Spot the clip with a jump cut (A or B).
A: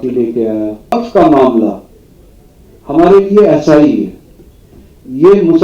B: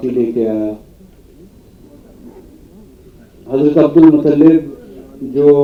A